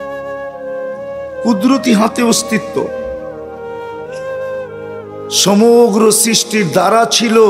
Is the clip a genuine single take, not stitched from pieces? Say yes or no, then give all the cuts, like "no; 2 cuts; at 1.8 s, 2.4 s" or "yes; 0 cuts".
no; 3 cuts; at 0.9 s, 2.9 s, 5.4 s